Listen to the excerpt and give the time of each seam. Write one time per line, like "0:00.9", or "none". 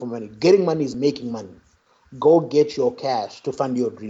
none